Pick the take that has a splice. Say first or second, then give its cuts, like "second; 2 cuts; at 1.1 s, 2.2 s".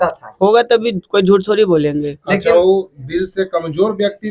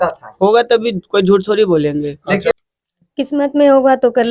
second; 1 cut; at 2.5 s